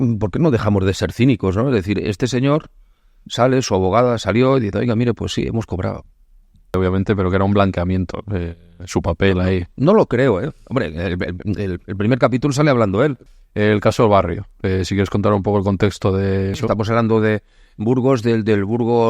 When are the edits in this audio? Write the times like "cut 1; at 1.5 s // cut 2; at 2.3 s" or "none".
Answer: cut 1; at 6.7 s // cut 2; at 13.2 s // cut 3; at 16.6 s